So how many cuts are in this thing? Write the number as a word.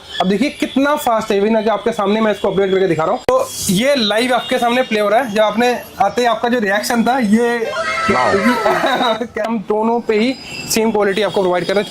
two